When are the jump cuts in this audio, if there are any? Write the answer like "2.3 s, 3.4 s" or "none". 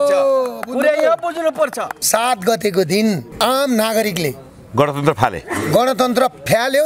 1.9 s